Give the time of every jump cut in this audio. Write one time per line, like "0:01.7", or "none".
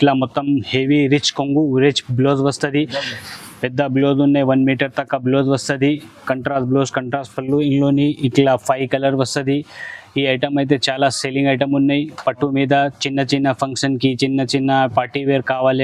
none